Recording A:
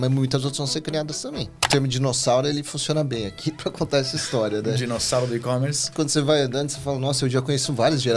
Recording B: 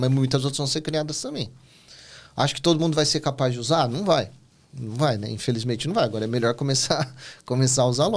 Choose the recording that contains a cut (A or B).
A